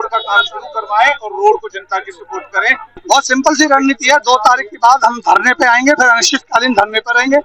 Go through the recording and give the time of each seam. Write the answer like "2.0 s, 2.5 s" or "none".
3.0 s

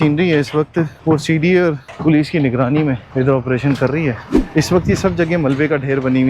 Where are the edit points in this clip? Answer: 1.0 s, 1.9 s, 3.0 s, 4.3 s

